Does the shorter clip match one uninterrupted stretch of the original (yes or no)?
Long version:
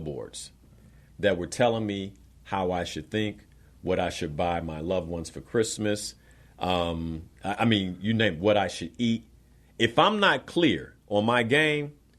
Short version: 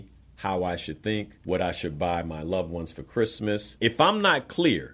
no